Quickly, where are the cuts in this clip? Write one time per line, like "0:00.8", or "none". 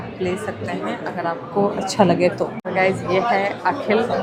none